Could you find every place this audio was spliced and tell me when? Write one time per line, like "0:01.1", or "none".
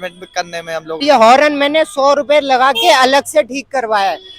0:01.0